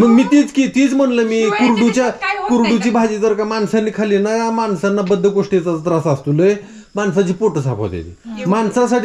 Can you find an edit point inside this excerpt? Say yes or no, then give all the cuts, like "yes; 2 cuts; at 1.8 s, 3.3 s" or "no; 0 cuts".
no; 0 cuts